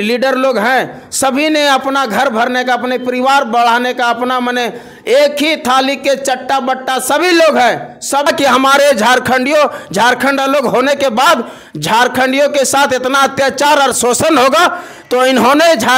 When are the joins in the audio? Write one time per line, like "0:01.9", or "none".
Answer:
0:08.3